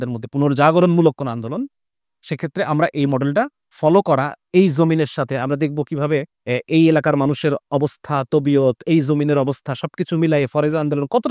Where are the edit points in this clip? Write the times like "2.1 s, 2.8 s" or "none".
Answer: 3.6 s, 6.3 s